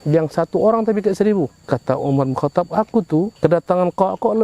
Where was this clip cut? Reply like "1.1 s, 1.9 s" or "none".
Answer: 1.6 s, 3.3 s